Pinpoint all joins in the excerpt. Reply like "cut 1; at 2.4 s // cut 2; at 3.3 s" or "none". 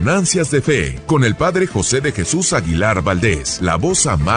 cut 1; at 0.9 s // cut 2; at 3.5 s